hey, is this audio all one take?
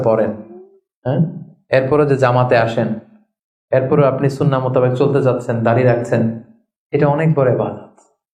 yes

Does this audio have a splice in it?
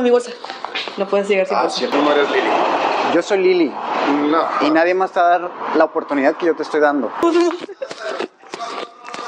yes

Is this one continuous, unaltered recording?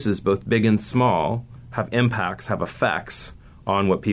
no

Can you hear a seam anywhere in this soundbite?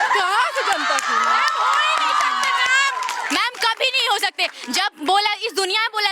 no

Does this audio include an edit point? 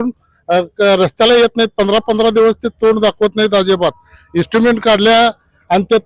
no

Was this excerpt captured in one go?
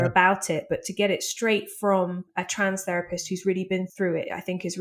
no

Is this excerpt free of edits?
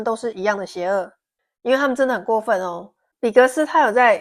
yes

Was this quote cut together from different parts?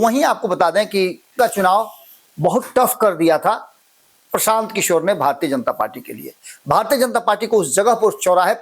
yes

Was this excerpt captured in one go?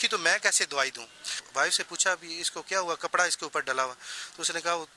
no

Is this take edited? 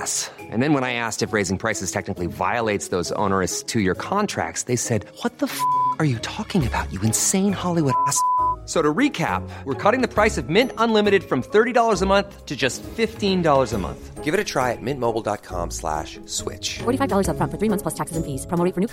no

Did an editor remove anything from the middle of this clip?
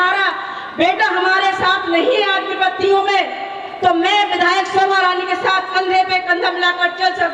no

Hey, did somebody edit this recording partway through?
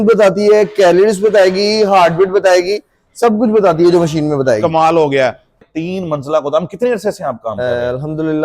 yes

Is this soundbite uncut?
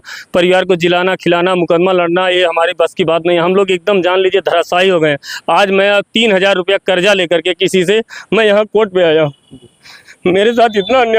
yes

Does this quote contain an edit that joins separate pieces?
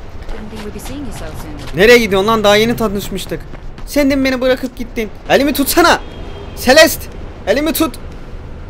yes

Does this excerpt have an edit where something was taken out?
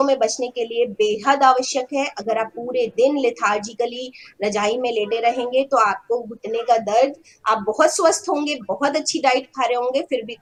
no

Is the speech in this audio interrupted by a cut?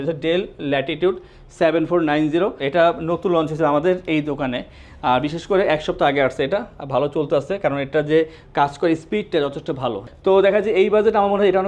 yes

